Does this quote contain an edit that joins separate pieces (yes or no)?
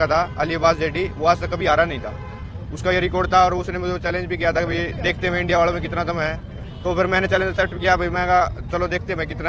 no